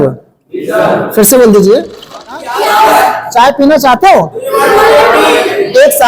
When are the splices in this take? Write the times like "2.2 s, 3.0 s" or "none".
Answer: 2.4 s

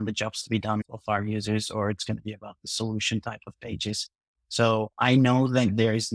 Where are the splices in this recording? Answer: none

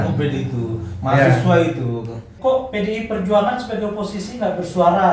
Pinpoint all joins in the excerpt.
2.3 s

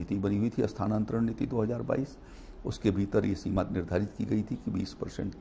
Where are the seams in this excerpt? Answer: none

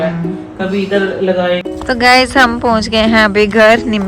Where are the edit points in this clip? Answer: 1.6 s

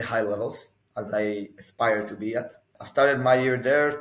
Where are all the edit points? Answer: 2.8 s

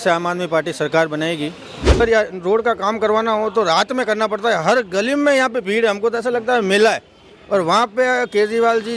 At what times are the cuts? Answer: 2.0 s

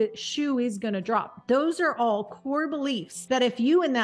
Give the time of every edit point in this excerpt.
1.3 s, 3.1 s

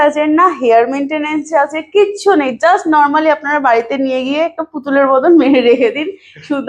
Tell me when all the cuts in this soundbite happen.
none

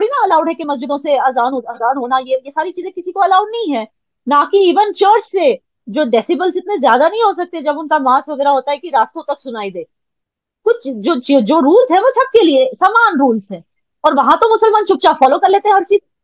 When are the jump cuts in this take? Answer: none

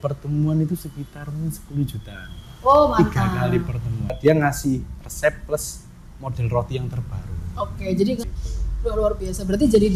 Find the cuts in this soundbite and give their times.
4.2 s, 8.2 s

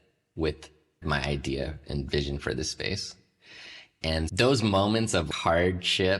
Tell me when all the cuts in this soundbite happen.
1.0 s, 4.3 s, 5.3 s

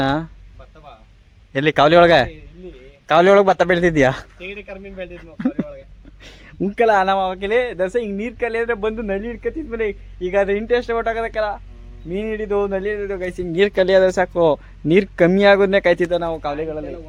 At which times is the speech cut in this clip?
none

